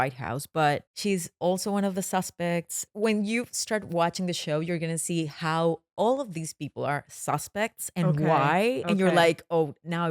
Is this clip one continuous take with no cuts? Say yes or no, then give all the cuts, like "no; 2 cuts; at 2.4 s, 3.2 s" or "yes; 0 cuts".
no; 2 cuts; at 0.9 s, 2.8 s